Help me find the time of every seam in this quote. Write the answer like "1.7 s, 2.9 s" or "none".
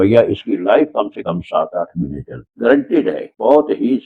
none